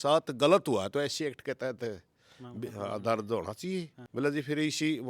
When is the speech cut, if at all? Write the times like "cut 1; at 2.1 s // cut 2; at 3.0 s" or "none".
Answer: cut 1; at 4.0 s